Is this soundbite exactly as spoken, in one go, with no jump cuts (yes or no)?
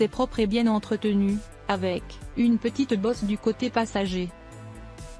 yes